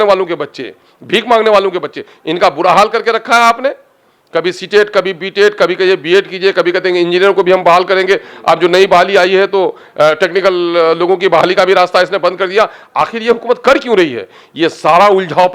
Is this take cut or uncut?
uncut